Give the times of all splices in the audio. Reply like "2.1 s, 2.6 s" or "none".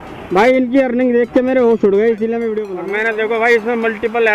2.7 s